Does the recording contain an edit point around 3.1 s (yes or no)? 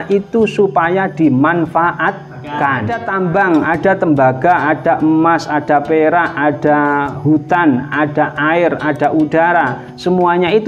yes